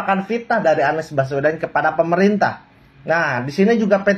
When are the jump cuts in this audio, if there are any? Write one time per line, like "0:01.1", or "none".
none

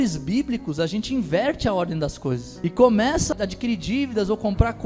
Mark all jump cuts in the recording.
0:03.3

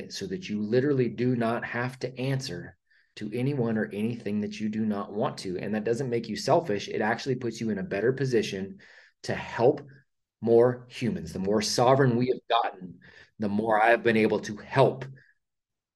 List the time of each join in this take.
none

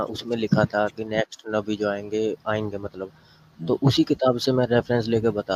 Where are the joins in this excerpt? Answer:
none

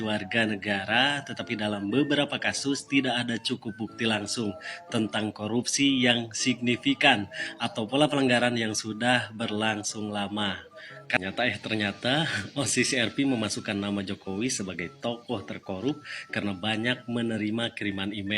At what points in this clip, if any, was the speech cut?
0:11.2

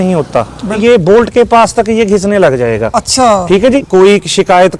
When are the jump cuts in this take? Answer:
0:00.8
0:03.8

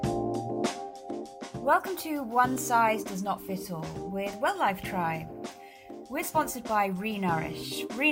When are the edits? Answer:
0:01.6

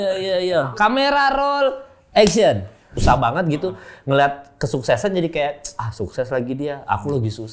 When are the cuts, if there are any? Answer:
0:02.9

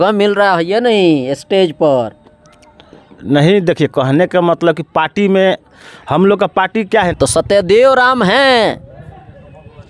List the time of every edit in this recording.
0:07.1

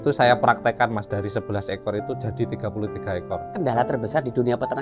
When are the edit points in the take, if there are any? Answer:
0:03.5

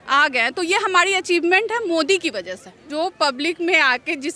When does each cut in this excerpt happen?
0:02.8

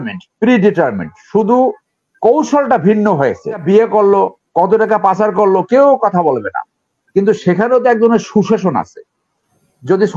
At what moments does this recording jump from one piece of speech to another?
0:03.6

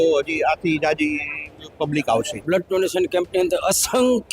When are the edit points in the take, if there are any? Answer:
0:02.4

